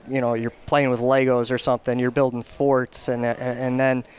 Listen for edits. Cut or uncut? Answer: uncut